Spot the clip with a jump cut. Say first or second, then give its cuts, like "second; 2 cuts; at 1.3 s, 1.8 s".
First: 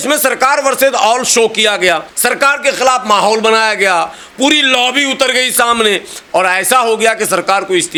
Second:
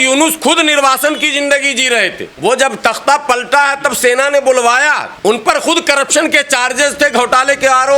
second; 1 cut; at 2.2 s